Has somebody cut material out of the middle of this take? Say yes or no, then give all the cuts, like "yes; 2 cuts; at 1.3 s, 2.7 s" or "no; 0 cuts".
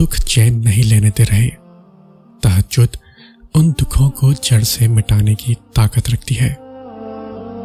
yes; 1 cut; at 6.7 s